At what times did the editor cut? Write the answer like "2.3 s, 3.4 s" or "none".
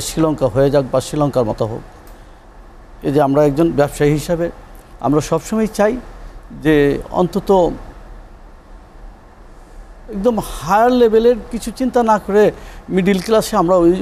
none